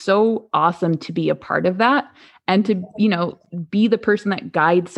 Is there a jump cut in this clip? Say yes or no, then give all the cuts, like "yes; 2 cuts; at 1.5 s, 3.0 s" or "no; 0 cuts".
no; 0 cuts